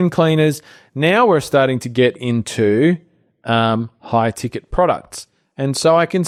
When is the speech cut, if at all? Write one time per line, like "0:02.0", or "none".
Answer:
none